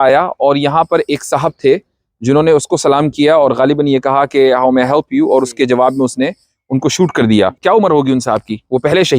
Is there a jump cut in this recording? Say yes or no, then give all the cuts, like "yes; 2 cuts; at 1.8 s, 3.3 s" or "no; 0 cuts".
yes; 1 cut; at 7.6 s